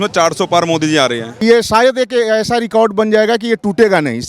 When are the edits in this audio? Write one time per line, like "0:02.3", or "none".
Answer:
0:01.4

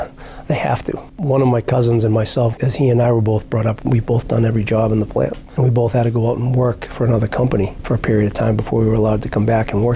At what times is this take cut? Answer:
0:01.1
0:02.5
0:03.8
0:05.4

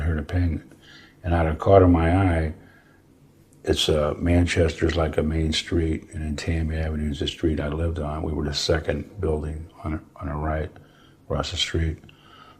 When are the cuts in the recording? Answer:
none

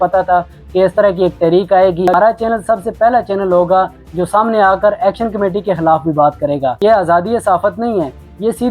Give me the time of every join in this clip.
0:02.1
0:06.8

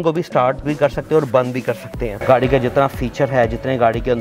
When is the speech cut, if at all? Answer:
0:02.1

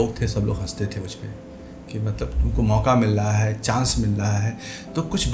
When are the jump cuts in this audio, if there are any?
none

